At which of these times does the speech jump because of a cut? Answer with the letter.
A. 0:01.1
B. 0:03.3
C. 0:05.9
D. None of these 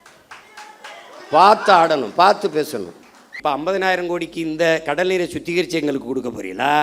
B